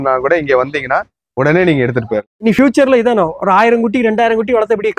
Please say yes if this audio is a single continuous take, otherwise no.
no